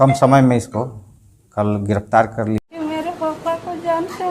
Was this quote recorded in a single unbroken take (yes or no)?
no